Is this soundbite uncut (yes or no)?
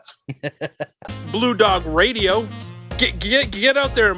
no